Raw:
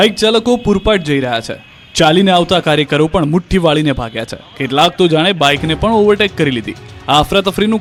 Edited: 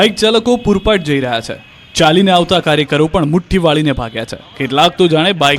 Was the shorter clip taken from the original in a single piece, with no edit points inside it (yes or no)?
yes